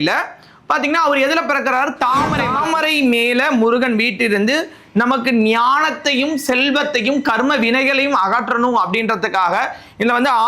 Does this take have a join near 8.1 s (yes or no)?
no